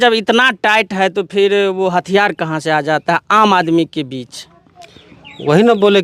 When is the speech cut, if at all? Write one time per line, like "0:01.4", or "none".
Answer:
none